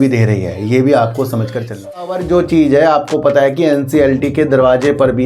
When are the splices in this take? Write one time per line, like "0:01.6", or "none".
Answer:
0:02.2